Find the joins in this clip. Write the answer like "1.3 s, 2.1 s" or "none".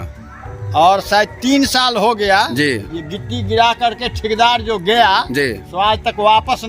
none